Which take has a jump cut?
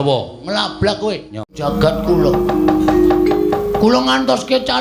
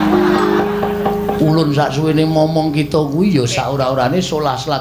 first; 1 cut; at 1.6 s

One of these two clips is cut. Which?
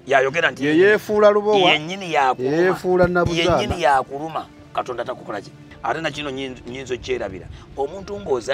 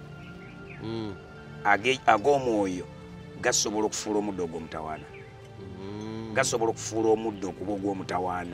first; 1 cut; at 5.6 s

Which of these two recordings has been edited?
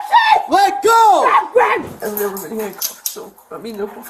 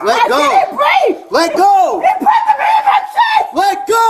first; 1 cut; at 2.0 s

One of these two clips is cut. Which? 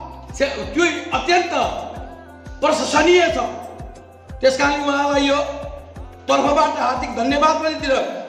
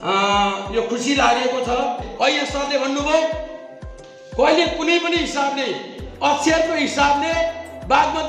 second; 1 cut; at 2.1 s

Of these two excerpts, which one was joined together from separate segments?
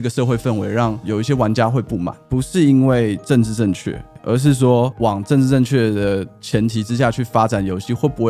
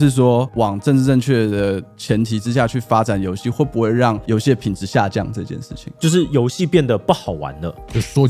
first; 2 cuts; at 1.0 s, 2.2 s

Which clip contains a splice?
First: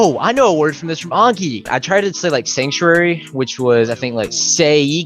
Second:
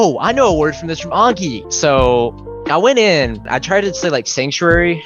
first; 1 cut; at 1.6 s

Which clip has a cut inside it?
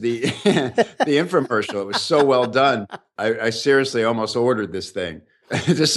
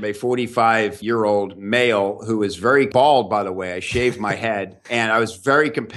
second; 2 cuts; at 1.0 s, 4.8 s

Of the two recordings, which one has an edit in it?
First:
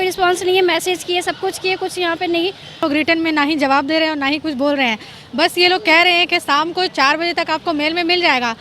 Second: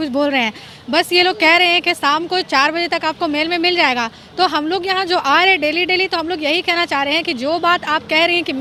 first; 1 cut; at 2.8 s

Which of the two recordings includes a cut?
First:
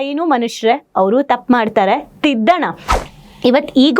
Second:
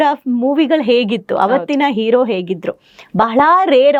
first; 1 cut; at 3.0 s

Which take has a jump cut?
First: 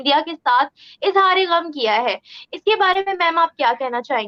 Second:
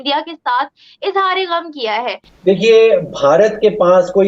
second; 1 cut; at 2.3 s

